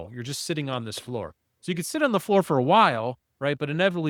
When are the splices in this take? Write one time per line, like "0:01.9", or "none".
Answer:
none